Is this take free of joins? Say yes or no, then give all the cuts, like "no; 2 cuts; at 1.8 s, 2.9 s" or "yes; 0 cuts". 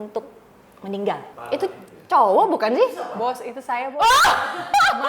no; 1 cut; at 1.3 s